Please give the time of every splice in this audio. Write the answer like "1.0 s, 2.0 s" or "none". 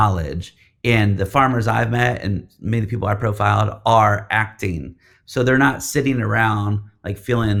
none